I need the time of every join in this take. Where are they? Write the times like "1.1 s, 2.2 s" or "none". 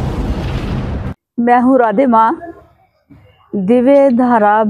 1.1 s